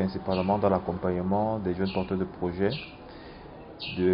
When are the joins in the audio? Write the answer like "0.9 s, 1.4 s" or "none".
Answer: none